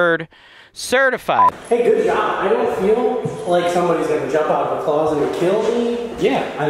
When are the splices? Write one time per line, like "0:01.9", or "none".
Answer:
0:01.5